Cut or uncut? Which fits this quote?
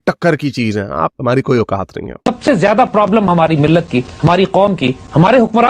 cut